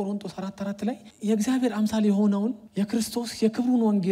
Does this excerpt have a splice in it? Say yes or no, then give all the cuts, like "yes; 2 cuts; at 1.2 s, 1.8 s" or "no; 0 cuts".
yes; 2 cuts; at 1.1 s, 2.6 s